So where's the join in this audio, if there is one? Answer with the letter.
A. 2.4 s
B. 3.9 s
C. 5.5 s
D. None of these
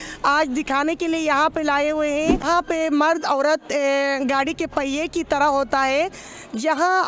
A